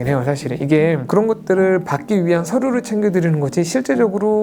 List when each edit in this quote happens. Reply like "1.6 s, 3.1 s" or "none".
1.0 s

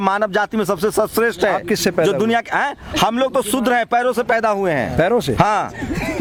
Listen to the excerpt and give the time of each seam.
none

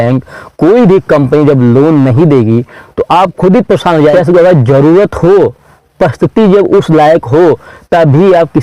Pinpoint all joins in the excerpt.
4.1 s

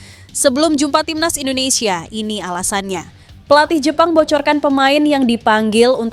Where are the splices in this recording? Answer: 3.2 s

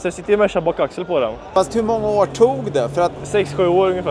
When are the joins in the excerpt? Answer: 1.5 s, 3.2 s

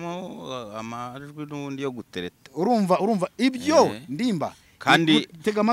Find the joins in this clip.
none

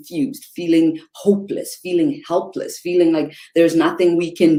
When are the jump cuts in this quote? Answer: none

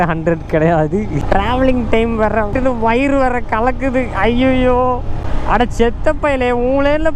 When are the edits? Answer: 1.2 s, 2.5 s, 5.3 s

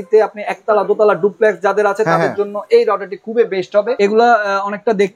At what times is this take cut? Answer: 4.0 s

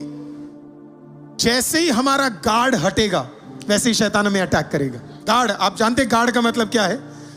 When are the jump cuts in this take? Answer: 5.1 s

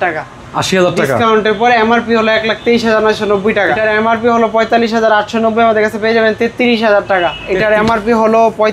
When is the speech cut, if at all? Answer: 3.7 s, 7.4 s

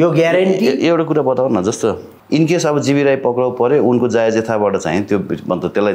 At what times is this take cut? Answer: 2.1 s

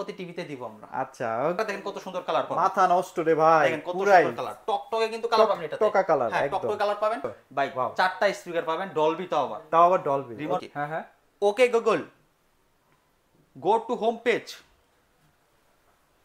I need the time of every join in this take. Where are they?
1.6 s, 7.4 s, 10.6 s

